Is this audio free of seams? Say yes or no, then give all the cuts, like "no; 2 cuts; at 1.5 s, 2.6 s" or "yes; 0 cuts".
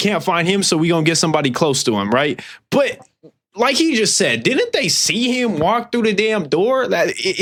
yes; 0 cuts